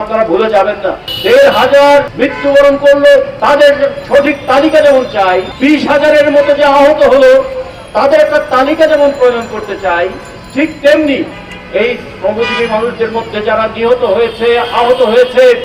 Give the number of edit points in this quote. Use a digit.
1